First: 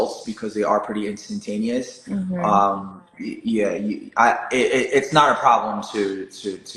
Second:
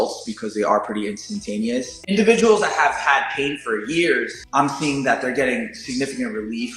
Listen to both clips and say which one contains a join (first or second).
second